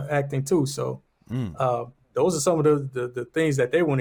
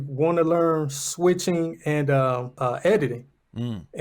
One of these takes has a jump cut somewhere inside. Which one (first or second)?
second